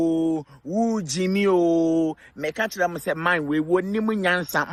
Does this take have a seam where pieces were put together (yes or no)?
no